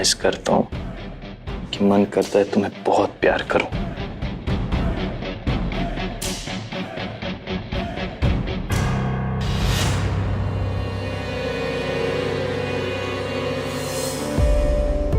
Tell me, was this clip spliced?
no; 0 cuts

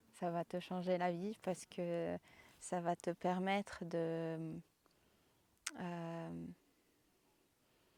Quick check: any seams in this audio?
no; 0 cuts

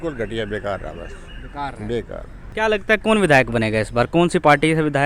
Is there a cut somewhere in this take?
yes; 1 cut; at 2.4 s

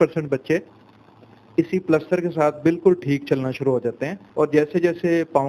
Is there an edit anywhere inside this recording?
yes; 1 cut; at 4.1 s

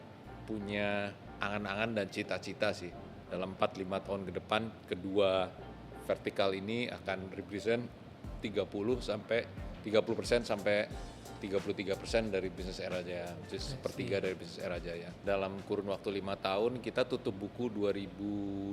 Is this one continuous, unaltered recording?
no; 3 cuts; at 1.3 s, 4.8 s, 15.2 s

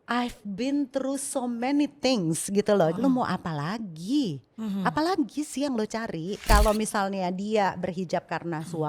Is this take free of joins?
no; 2 cuts; at 3.0 s, 6.4 s

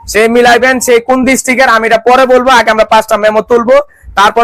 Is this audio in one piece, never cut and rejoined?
yes; 0 cuts

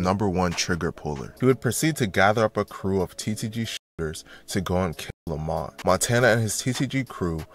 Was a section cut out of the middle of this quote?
yes; 2 cuts; at 1.3 s, 5.7 s

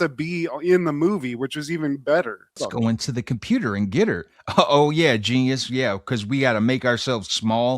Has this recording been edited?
yes; 1 cut; at 2.6 s

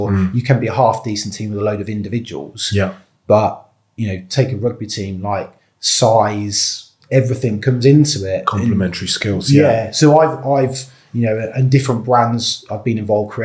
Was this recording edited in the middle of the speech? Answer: no; 0 cuts

